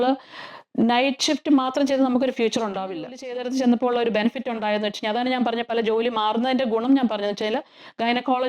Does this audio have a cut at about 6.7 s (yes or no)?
no